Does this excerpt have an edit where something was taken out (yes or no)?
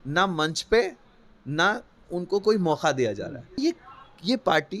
yes